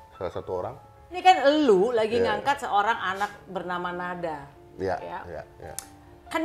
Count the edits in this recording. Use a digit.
1